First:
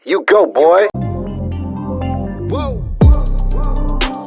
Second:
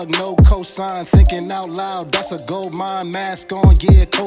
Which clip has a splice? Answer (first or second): first